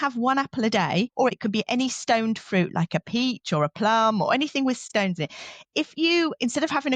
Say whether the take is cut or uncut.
cut